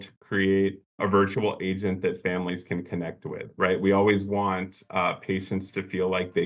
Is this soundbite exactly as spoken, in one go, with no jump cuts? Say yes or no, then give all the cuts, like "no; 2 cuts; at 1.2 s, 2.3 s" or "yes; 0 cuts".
yes; 0 cuts